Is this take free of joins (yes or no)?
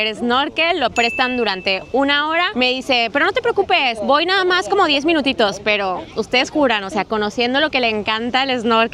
yes